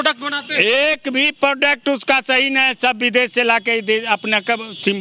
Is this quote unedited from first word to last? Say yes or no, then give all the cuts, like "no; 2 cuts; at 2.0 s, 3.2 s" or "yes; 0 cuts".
yes; 0 cuts